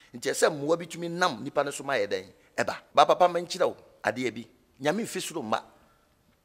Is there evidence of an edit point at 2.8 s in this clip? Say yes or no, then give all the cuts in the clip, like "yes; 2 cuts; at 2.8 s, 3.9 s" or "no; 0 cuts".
yes; 1 cut; at 2.8 s